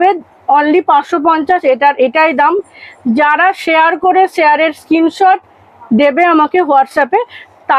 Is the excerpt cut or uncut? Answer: uncut